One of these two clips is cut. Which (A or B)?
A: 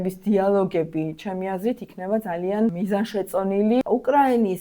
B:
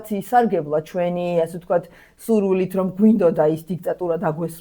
A